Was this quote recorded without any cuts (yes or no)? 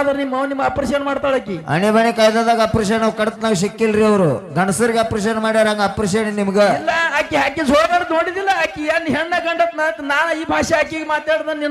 yes